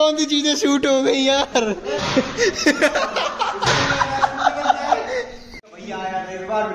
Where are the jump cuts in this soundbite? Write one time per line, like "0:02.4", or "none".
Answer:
0:05.7